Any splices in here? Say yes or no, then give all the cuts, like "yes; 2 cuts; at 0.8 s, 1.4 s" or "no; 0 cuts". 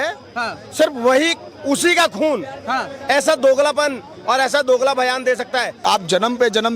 yes; 1 cut; at 5.8 s